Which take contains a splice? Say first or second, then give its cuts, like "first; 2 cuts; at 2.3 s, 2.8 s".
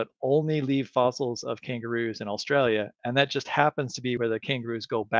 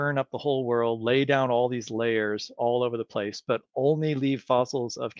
first; 1 cut; at 4.2 s